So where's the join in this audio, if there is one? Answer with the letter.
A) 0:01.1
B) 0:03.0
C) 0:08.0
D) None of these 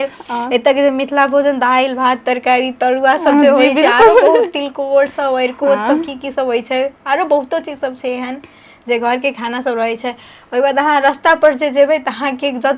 D